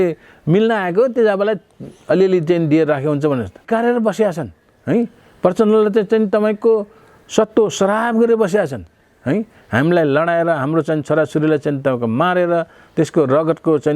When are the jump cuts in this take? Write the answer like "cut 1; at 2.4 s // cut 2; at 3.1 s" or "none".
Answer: cut 1; at 3.6 s